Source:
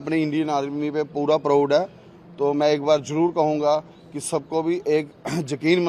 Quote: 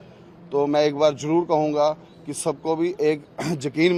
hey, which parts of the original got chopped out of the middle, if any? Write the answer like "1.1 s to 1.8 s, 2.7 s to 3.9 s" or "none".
none